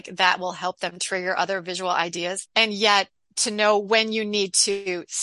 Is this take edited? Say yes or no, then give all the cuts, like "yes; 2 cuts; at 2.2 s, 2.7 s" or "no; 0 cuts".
yes; 1 cut; at 2.4 s